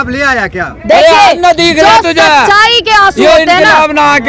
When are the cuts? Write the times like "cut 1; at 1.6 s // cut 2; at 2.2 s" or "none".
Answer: none